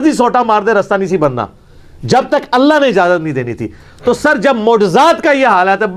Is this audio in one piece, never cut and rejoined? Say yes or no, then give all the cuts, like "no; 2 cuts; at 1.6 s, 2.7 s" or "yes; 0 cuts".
yes; 0 cuts